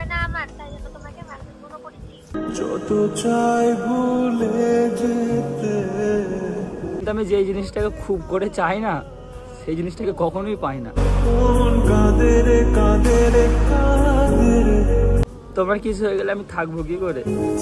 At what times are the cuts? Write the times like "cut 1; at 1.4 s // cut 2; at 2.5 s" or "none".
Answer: cut 1; at 7.0 s // cut 2; at 15.3 s